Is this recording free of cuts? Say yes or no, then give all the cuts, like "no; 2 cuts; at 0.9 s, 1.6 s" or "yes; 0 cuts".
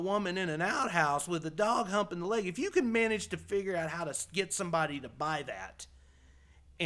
yes; 0 cuts